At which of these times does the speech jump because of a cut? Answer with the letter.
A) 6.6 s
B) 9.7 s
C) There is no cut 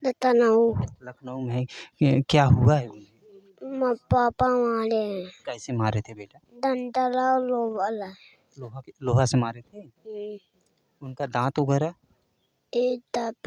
C